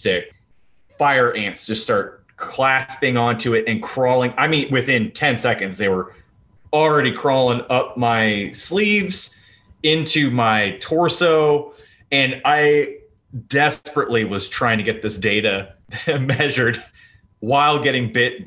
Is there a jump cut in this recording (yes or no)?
no